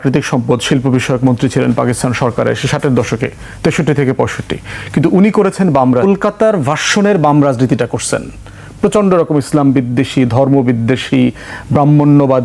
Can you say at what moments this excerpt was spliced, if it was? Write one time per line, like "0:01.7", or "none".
0:06.0